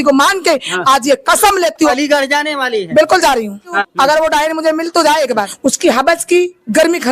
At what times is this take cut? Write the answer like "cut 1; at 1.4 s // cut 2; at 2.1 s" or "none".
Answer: cut 1; at 1.9 s // cut 2; at 3.8 s // cut 3; at 5.5 s